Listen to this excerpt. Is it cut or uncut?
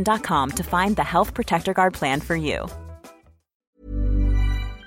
cut